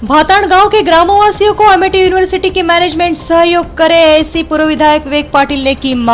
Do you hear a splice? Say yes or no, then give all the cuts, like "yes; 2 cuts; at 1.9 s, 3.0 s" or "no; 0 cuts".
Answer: no; 0 cuts